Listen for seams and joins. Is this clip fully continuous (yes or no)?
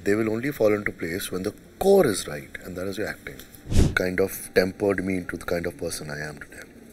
no